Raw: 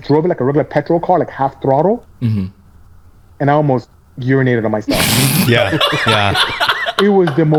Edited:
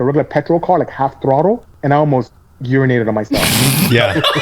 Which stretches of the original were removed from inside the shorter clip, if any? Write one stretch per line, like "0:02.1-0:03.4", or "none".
0:02.1-0:03.3